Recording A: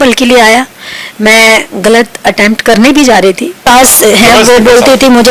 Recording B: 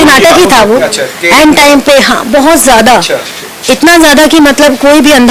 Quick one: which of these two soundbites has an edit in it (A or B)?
A